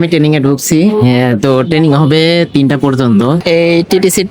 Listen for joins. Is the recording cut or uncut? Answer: cut